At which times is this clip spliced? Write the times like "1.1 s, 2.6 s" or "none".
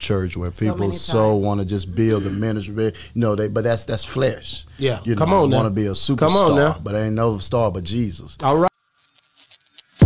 8.7 s